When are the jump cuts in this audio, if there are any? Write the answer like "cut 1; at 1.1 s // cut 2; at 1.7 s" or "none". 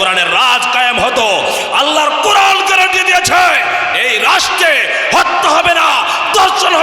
none